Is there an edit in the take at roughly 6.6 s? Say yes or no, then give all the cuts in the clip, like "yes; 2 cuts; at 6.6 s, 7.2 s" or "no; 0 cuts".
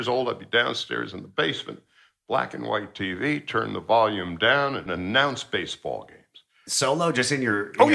yes; 2 cuts; at 4.9 s, 6.6 s